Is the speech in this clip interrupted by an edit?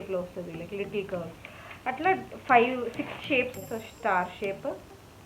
yes; 1 cut; at 3.6 s

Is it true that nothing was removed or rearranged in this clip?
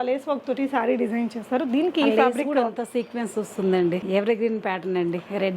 no; 1 cut; at 4.0 s

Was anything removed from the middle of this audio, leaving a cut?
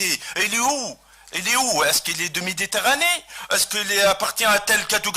yes; 1 cut; at 4.2 s

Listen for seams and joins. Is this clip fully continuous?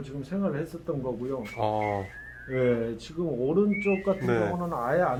yes; 0 cuts

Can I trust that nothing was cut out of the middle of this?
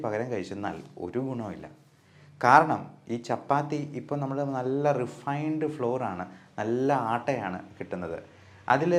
yes; 0 cuts

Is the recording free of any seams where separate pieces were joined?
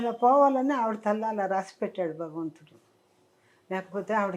yes; 0 cuts

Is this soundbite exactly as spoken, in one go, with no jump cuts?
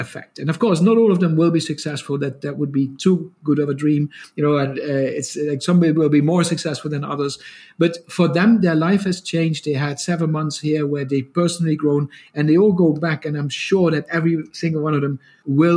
yes; 0 cuts

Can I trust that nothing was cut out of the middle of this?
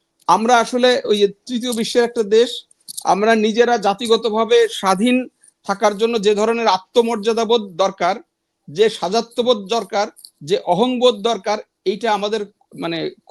yes; 0 cuts

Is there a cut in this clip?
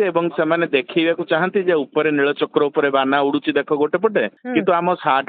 yes; 1 cut; at 4.4 s

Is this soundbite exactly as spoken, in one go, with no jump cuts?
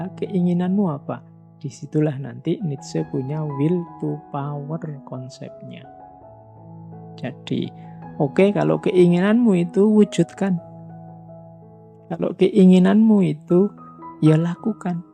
no; 2 cuts; at 10.8 s, 12.1 s

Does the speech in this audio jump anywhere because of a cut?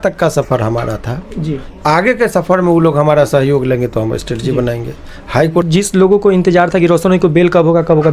yes; 1 cut; at 5.7 s

